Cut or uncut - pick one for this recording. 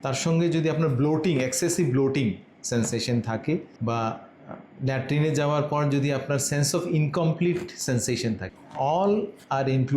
cut